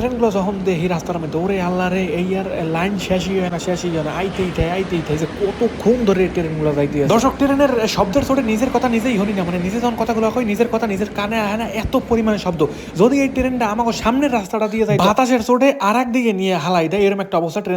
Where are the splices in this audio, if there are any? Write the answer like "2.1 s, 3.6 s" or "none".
none